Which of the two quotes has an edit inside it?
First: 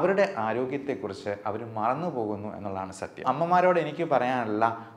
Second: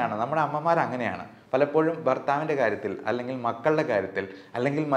first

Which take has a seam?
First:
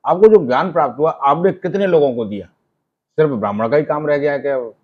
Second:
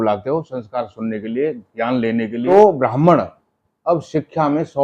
second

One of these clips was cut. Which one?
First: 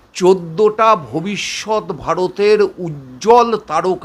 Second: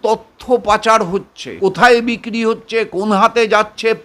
second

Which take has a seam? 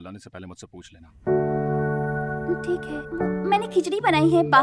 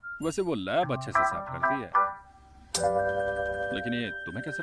first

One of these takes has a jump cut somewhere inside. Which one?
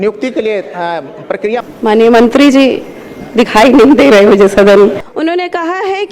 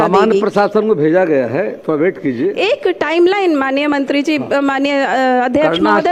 first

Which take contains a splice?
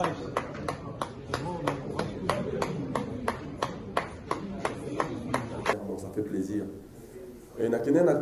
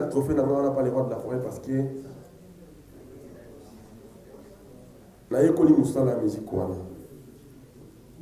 first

